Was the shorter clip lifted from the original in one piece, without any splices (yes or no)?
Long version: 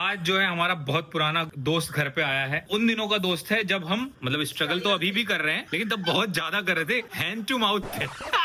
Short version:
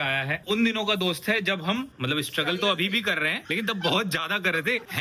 yes